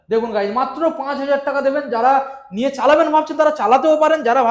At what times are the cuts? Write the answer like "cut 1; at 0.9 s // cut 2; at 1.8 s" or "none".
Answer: none